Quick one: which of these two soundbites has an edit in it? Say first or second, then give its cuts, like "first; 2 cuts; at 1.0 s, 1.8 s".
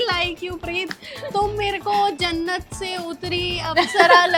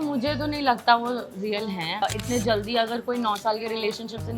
second; 1 cut; at 2.0 s